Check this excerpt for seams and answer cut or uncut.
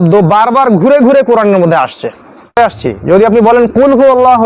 cut